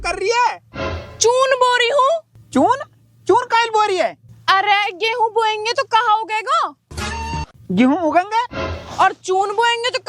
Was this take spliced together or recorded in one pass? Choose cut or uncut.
uncut